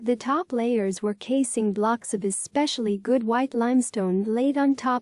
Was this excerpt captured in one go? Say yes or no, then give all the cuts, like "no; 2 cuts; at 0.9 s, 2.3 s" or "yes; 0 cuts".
yes; 0 cuts